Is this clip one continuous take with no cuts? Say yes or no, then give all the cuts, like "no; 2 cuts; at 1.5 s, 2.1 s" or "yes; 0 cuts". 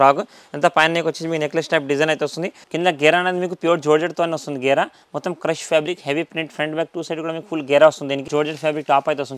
no; 2 cuts; at 2.6 s, 8.3 s